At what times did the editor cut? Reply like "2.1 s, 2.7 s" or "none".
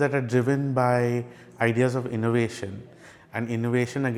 none

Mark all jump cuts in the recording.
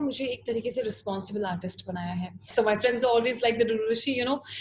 2.5 s

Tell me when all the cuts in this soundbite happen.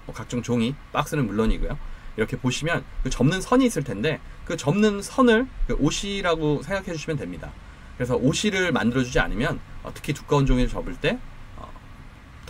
none

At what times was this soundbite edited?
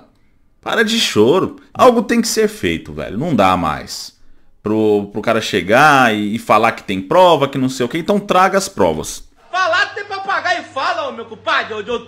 1.6 s, 9.5 s

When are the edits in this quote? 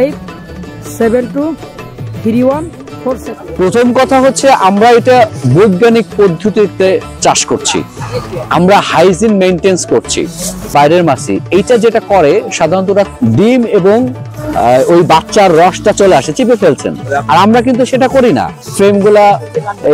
3.4 s, 10.7 s, 13.1 s, 18.6 s

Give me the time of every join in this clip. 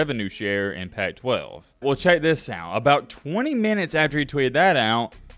1.6 s

